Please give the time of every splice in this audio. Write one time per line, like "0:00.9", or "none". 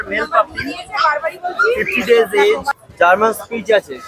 0:02.8